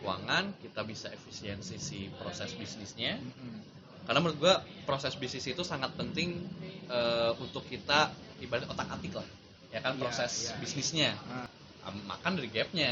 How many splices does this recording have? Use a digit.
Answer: 1